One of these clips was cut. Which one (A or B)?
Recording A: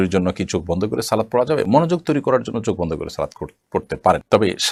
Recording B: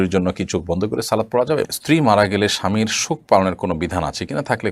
B